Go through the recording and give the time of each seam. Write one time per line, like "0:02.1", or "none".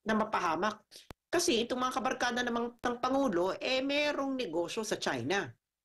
0:00.9